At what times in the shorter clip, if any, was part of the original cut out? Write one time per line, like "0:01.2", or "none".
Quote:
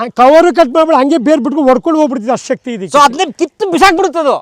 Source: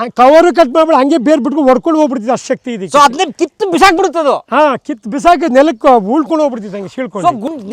none

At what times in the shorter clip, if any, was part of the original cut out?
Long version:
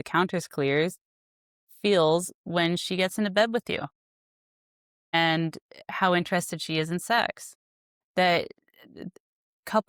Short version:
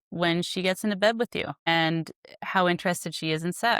0:01.5

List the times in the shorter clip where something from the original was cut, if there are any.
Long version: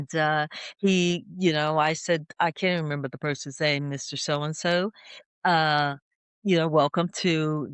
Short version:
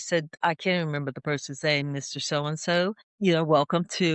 0:03.1

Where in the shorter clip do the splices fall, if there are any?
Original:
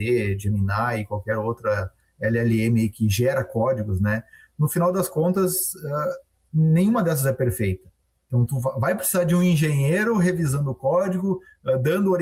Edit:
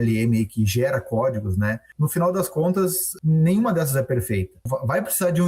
0:01.9
0:03.1
0:04.6

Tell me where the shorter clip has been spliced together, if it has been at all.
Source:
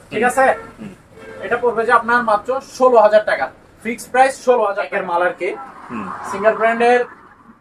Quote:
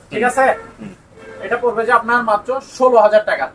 none

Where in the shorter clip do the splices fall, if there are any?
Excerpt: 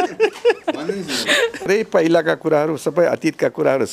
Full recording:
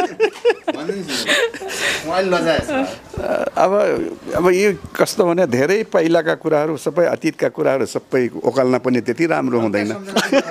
0:01.7

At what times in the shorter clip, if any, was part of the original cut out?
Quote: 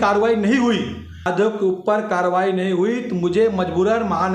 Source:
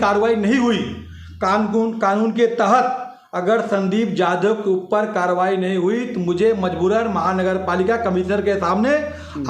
0:01.3

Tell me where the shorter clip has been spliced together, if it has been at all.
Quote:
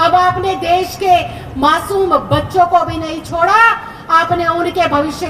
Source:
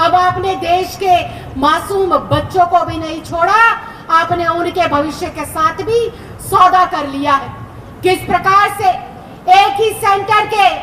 none

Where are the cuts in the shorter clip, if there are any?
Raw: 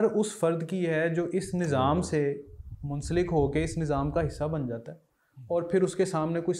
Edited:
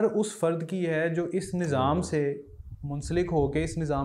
none

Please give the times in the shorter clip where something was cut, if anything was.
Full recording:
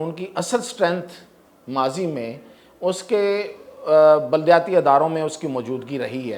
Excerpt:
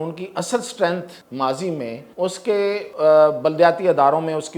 0:01.2
0:02.0
0:02.9

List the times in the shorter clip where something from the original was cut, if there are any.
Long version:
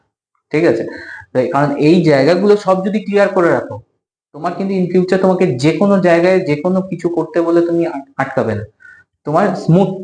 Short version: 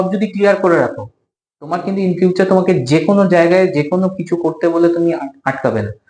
none

